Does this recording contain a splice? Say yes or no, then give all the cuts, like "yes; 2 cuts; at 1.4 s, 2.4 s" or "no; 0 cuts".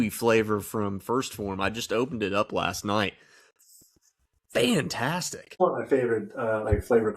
yes; 1 cut; at 5.4 s